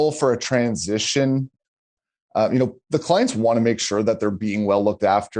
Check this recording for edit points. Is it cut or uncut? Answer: uncut